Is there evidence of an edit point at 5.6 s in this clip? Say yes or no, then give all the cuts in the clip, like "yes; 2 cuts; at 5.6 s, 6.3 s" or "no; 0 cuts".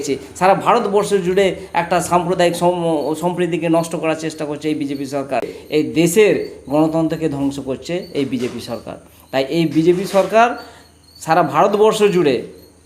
yes; 1 cut; at 5.6 s